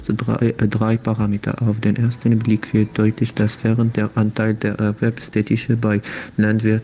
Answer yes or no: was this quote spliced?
yes